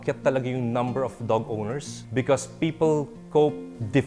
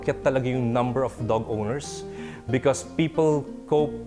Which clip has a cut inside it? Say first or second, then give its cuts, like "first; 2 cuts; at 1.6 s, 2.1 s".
first; 1 cut; at 1.9 s